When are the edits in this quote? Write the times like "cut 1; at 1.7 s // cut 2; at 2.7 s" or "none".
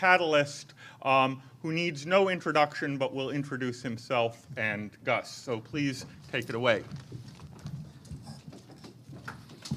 none

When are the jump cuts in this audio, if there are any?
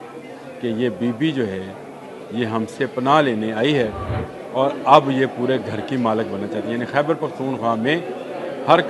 none

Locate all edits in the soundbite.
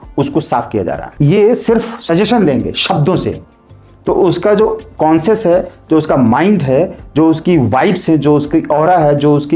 cut 1; at 1.0 s

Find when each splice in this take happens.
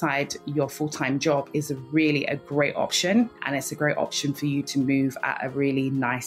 cut 1; at 3.4 s

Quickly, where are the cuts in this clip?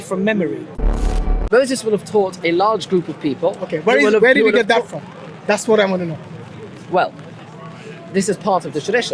cut 1; at 0.9 s

